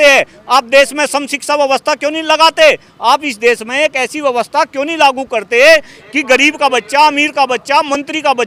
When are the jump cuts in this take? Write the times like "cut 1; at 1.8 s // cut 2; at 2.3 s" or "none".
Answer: none